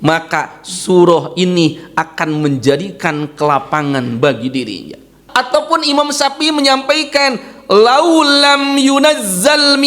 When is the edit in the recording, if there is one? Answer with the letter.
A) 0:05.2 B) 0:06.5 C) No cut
A